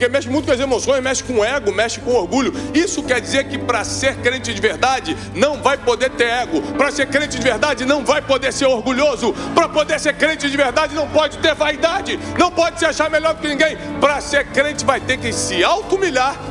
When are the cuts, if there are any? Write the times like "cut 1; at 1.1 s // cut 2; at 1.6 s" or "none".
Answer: none

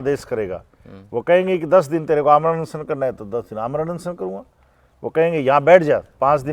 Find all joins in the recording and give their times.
none

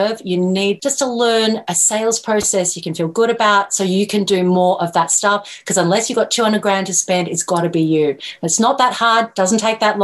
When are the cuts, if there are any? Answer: cut 1; at 0.8 s // cut 2; at 1.6 s

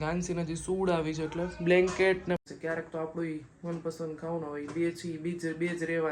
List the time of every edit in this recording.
cut 1; at 2.4 s

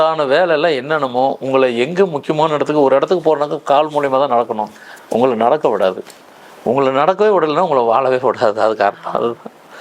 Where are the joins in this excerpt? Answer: none

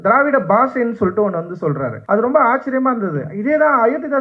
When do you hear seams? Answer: cut 1; at 1.9 s

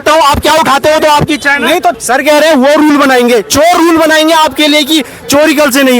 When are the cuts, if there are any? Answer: cut 1; at 2.0 s

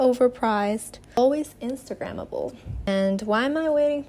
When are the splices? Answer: cut 1; at 1.2 s // cut 2; at 2.9 s

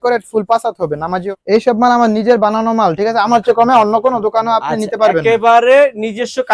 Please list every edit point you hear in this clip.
cut 1; at 1.2 s

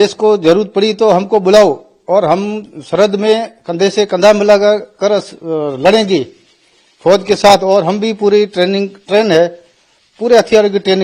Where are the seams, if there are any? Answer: none

